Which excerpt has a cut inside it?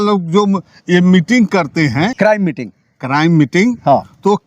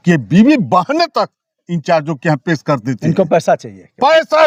first; 1 cut; at 2.1 s

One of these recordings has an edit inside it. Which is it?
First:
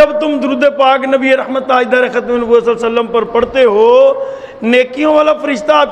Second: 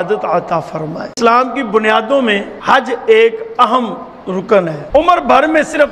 second; 3 cuts; at 1.1 s, 2.5 s, 4.8 s

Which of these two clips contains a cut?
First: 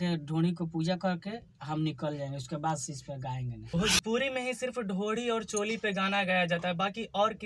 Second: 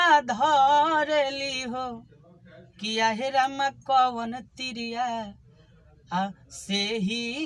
first; 1 cut; at 3.6 s

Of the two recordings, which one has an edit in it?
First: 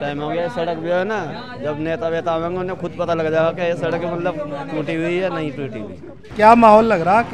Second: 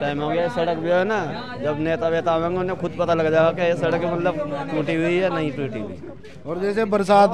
first; 1 cut; at 6.2 s

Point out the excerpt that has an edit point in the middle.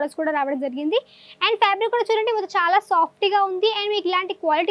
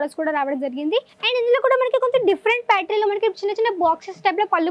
second; 1 cut; at 1.2 s

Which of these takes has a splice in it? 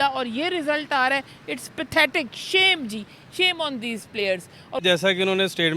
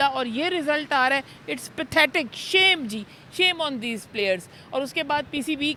first; 1 cut; at 4.8 s

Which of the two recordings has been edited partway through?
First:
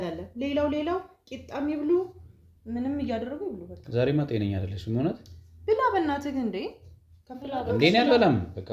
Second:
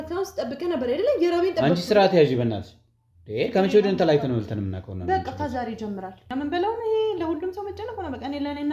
second; 1 cut; at 6.2 s

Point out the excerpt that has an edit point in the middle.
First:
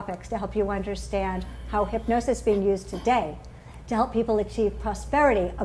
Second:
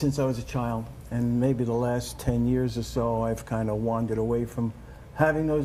first; 1 cut; at 4.5 s

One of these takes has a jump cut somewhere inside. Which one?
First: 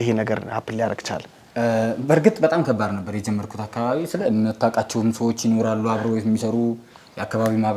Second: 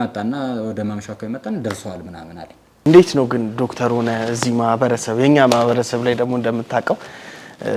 second; 1 cut; at 2.7 s

